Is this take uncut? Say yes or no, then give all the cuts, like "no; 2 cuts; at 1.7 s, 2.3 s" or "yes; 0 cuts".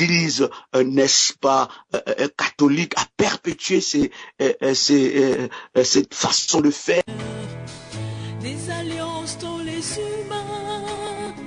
no; 1 cut; at 7.0 s